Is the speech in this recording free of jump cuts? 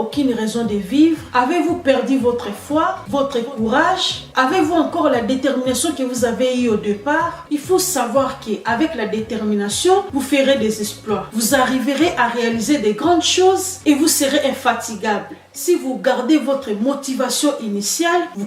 yes; 0 cuts

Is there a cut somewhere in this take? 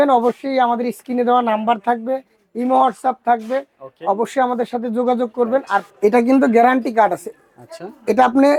yes; 1 cut; at 5.9 s

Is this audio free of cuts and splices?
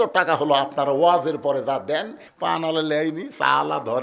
no; 1 cut; at 2.2 s

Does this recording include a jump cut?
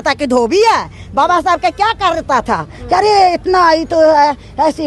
no; 0 cuts

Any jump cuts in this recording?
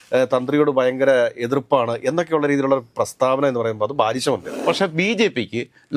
yes; 1 cut; at 4.5 s

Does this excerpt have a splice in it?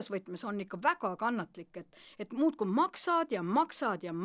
no; 0 cuts

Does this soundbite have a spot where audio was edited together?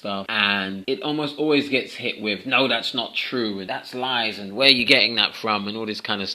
yes; 1 cut; at 3.6 s

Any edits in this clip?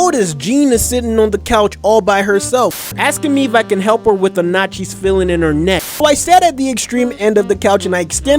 yes; 2 cuts; at 2.8 s, 6.0 s

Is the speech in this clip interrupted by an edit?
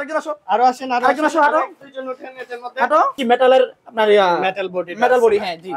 yes; 1 cut; at 3.2 s

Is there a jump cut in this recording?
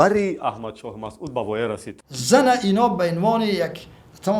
yes; 1 cut; at 1.9 s

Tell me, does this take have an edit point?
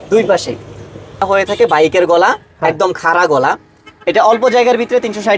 yes; 1 cut; at 1.2 s

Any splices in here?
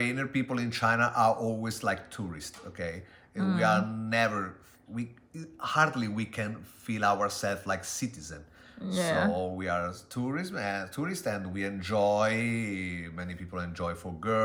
no; 0 cuts

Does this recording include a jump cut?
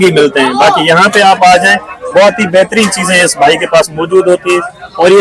no; 0 cuts

